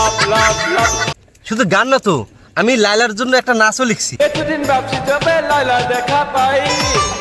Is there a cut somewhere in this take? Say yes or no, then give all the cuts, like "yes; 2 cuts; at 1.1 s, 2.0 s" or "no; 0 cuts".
yes; 2 cuts; at 1.1 s, 4.1 s